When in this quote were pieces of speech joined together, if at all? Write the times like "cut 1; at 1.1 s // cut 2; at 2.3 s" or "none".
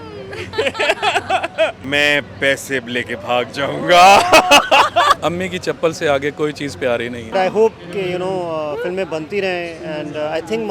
cut 1; at 1.8 s // cut 2; at 5.2 s // cut 3; at 7.3 s